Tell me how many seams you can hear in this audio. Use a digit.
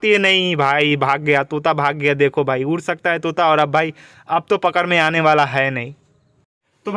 0